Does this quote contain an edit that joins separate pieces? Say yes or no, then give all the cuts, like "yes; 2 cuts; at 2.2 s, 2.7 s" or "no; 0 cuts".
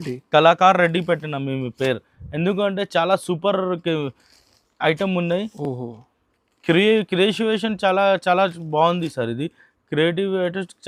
no; 0 cuts